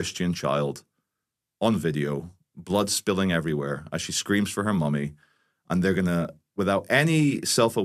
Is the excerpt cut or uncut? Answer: uncut